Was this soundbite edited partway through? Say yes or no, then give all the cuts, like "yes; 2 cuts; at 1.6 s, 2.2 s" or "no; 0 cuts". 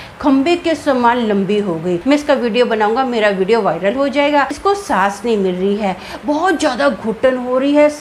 yes; 2 cuts; at 2.0 s, 4.6 s